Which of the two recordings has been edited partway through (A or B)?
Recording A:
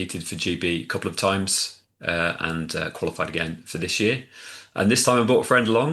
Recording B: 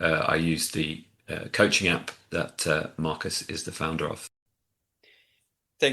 B